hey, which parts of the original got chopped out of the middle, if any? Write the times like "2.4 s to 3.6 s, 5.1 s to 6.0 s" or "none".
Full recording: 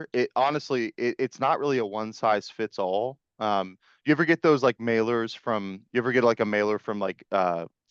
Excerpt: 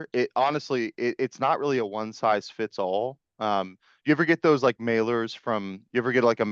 none